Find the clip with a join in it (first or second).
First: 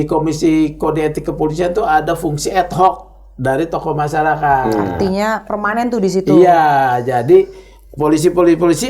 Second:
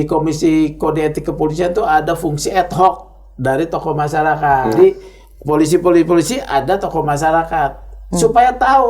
second